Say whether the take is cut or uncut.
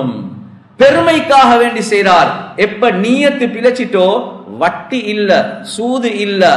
uncut